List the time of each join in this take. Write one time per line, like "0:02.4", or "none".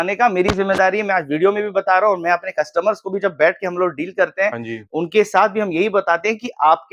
none